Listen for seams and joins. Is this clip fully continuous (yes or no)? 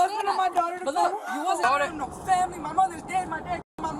no